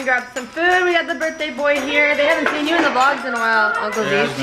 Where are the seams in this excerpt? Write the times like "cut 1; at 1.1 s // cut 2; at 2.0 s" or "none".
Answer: none